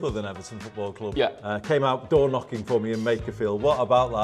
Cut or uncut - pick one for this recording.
cut